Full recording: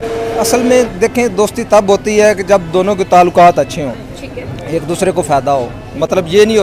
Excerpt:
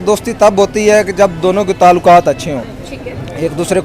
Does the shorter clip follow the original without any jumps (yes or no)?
yes